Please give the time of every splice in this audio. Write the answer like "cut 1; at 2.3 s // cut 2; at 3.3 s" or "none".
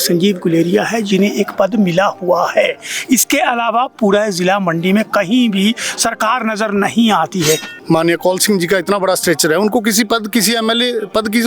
cut 1; at 7.7 s